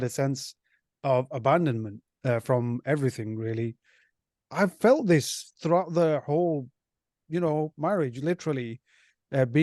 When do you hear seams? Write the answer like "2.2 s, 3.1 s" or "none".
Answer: 4.1 s